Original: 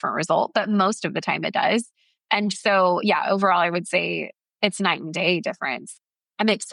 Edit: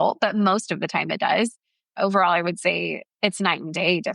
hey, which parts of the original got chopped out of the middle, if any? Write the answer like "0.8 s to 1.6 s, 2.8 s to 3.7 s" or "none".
2.3 s to 3.2 s, 4.3 s to 4.4 s